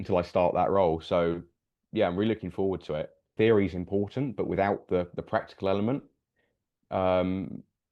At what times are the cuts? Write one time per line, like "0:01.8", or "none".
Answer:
0:03.3